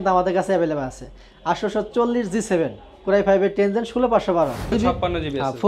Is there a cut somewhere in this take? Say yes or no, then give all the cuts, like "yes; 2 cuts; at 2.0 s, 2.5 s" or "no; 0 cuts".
yes; 1 cut; at 4.7 s